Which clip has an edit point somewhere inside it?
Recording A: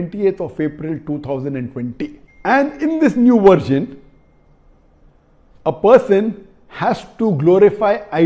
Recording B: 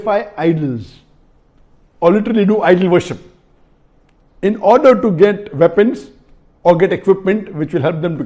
A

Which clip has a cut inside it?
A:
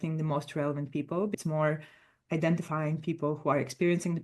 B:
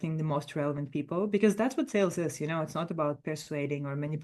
A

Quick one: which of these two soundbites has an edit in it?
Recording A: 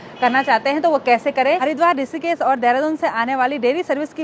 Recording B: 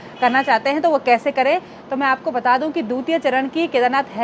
A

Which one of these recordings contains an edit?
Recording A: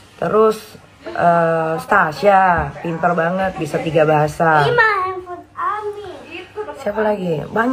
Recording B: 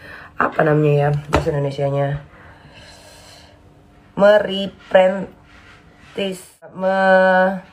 B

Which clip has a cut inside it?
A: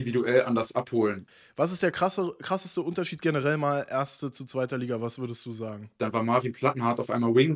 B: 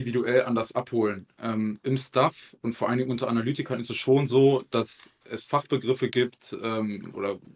A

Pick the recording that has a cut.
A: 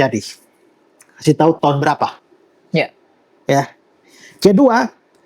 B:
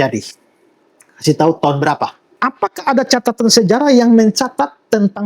B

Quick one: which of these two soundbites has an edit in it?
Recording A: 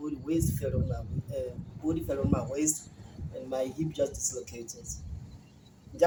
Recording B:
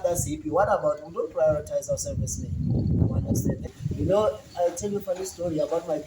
B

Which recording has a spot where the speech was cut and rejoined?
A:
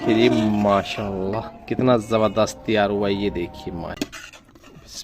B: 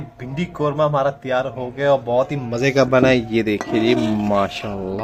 A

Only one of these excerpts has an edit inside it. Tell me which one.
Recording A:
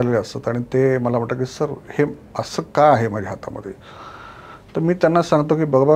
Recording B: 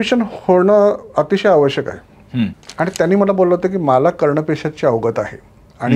B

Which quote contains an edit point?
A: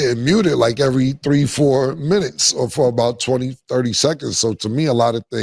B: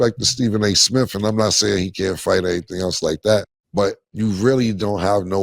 B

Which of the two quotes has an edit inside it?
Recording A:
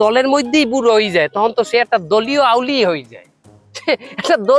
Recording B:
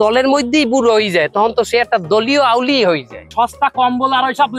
B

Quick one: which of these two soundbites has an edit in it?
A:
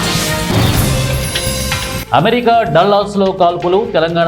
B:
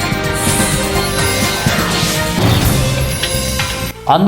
A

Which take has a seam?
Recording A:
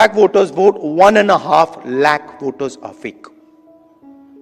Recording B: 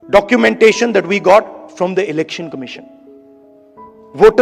A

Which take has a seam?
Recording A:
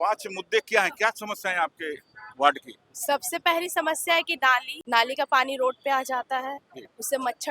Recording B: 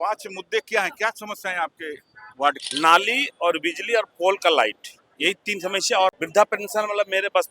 B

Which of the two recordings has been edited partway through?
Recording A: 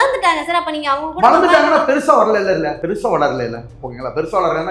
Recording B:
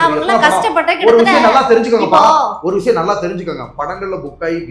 A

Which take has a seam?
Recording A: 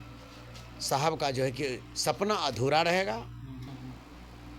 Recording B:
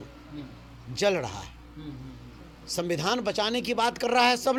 A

